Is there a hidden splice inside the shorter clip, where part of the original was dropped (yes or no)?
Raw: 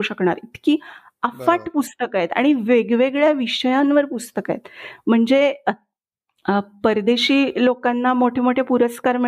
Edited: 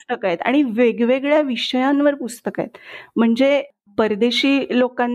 yes